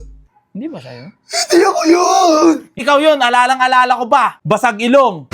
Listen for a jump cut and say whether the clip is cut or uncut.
cut